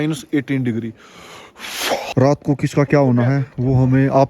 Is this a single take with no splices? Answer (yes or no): no